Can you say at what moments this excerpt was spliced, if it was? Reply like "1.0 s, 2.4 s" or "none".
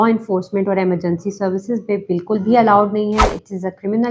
none